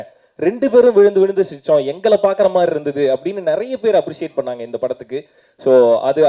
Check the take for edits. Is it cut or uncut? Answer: uncut